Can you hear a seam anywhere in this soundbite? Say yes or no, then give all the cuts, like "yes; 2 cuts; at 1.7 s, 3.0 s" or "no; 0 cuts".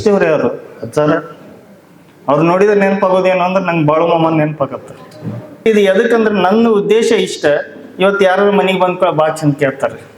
yes; 1 cut; at 5.7 s